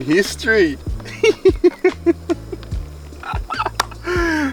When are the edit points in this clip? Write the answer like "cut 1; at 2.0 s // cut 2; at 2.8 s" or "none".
none